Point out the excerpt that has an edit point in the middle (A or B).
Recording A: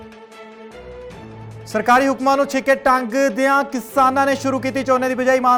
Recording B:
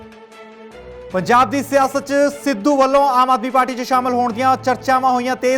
B